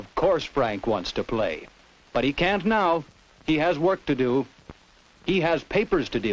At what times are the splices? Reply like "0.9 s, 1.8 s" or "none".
5.3 s